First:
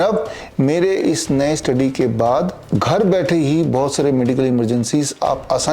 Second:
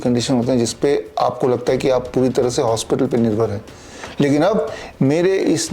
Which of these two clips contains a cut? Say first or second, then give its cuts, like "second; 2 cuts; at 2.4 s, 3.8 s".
first; 1 cut; at 2.6 s